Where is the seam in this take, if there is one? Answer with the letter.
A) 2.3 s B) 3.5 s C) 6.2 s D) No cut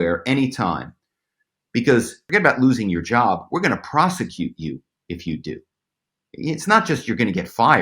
A